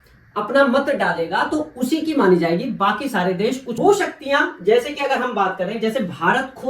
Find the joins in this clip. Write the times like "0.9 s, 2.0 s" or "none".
3.7 s